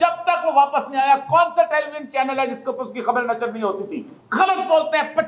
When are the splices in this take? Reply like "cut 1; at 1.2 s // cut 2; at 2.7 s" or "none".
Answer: cut 1; at 4.1 s